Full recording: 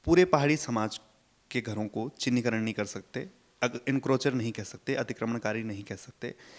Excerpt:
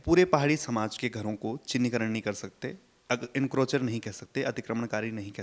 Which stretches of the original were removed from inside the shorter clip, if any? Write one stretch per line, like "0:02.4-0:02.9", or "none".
0:01.0-0:01.5